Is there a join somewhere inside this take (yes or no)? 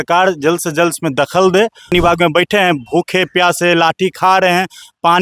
yes